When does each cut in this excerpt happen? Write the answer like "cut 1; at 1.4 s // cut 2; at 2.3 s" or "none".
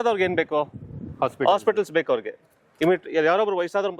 none